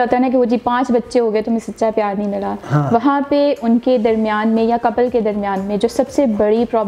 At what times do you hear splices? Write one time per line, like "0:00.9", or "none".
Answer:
none